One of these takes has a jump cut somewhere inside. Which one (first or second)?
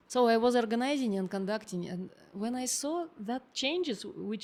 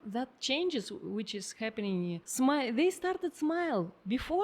second